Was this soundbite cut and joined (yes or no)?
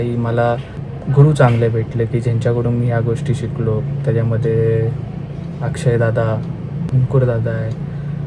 yes